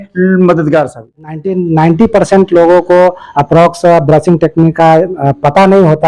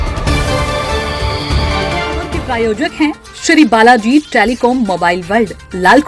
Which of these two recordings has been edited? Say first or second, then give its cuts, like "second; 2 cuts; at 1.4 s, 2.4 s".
first; 1 cut; at 1.5 s